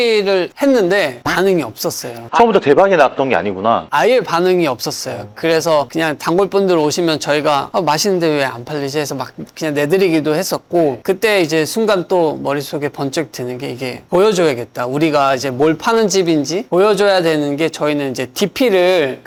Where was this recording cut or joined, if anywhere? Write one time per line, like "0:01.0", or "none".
none